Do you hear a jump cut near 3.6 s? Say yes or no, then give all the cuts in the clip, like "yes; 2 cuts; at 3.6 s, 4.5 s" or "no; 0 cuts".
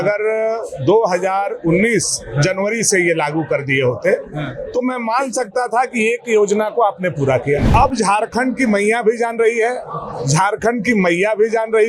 no; 1 cut; at 7.7 s